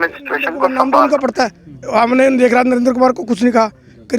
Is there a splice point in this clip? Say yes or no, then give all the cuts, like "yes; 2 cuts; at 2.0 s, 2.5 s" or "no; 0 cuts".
yes; 1 cut; at 1.1 s